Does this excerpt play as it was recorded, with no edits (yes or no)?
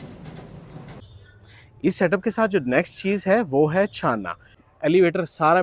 no